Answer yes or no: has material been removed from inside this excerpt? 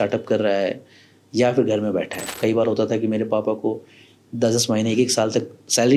yes